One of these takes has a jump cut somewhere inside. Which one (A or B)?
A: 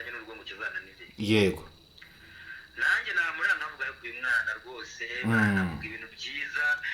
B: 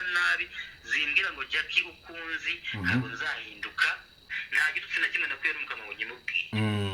B